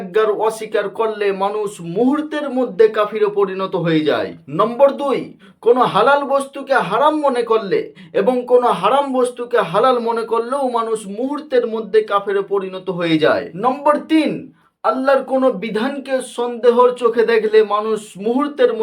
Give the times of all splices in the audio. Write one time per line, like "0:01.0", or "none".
0:04.3
0:13.5